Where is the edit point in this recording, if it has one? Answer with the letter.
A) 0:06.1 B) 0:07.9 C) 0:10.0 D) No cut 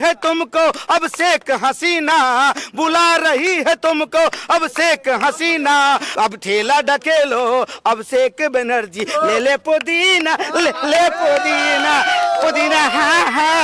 A